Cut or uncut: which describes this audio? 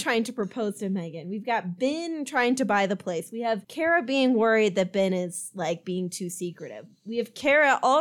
uncut